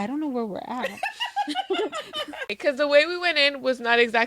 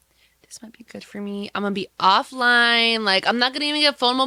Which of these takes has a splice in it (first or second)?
first